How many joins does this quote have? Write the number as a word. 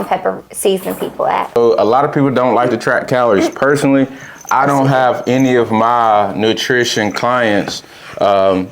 one